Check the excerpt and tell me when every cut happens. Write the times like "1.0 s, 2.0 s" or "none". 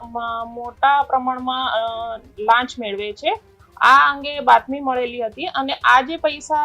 none